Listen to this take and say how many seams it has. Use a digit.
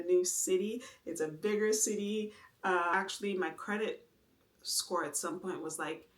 1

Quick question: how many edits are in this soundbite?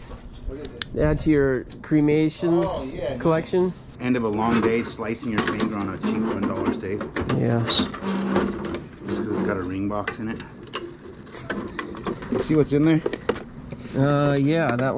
2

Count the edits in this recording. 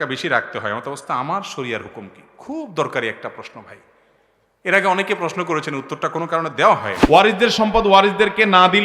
1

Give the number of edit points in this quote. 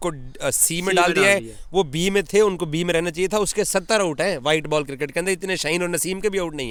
0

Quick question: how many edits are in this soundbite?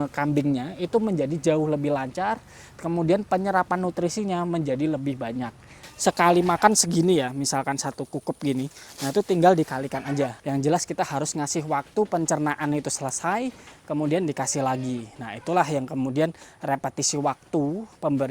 2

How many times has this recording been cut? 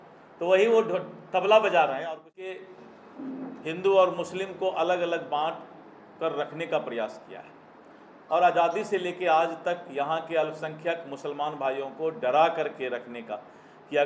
1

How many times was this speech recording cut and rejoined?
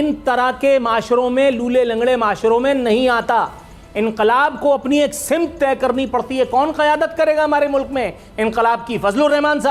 0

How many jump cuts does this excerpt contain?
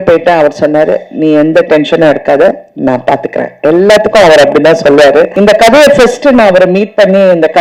1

